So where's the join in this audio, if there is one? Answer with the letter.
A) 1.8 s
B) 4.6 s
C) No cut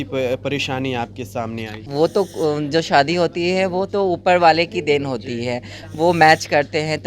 A